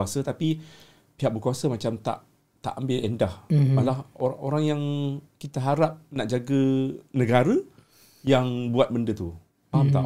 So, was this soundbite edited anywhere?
no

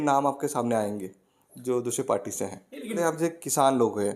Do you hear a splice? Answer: yes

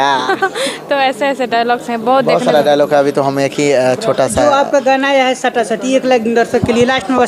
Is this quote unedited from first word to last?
yes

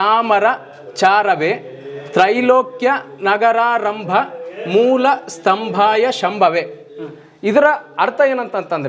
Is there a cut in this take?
no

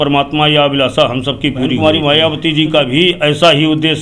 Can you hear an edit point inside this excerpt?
yes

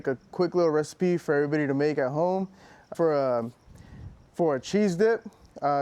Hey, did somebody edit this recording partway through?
yes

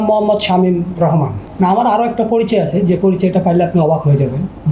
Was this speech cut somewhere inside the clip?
yes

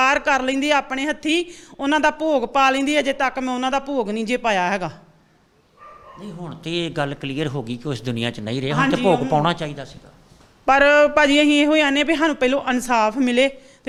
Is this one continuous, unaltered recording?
yes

